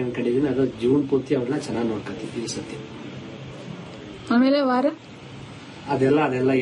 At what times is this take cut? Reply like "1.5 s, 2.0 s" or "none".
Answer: 2.5 s